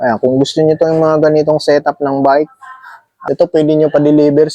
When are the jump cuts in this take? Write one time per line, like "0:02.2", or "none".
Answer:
0:03.2